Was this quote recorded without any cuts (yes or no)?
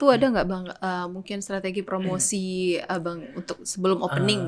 yes